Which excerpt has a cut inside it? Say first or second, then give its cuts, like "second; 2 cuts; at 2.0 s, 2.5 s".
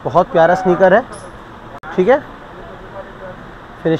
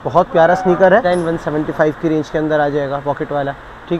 second; 1 cut; at 1.0 s